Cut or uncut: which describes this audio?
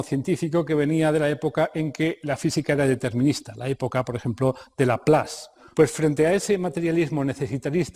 uncut